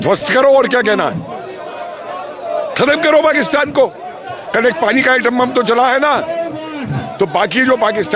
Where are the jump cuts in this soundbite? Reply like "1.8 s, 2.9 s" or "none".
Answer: none